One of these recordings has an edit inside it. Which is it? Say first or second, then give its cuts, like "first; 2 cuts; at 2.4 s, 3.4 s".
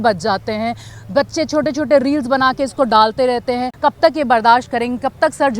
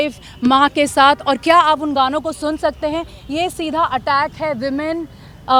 first; 1 cut; at 3.7 s